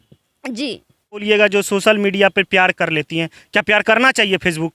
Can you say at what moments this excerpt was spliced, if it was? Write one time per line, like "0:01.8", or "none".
0:01.2